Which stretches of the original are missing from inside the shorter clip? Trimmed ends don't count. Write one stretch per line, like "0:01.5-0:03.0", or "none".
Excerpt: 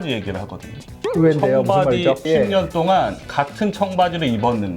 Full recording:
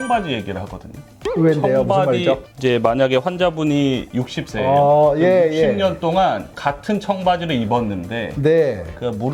0:02.5-0:05.5